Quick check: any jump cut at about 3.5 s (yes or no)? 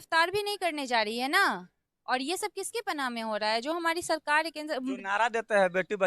no